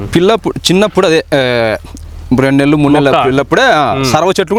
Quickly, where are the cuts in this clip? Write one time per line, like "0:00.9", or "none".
none